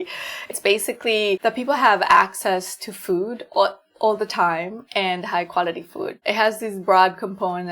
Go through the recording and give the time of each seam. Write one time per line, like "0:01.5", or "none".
0:01.4
0:06.2